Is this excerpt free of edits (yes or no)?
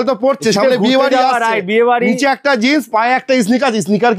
yes